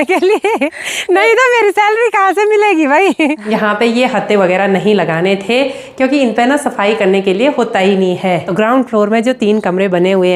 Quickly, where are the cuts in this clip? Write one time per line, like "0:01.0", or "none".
0:03.4
0:08.5